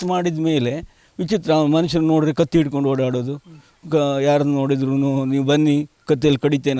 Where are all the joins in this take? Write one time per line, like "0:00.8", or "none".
none